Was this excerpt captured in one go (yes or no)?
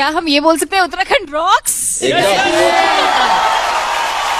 yes